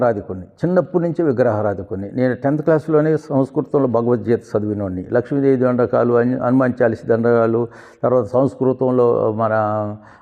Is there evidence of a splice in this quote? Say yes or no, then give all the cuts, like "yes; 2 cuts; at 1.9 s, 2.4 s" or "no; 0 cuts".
no; 0 cuts